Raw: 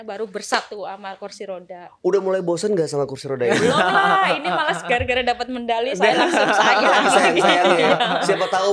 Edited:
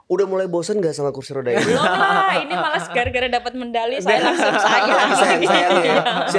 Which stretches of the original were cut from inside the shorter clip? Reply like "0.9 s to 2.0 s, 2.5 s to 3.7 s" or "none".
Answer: none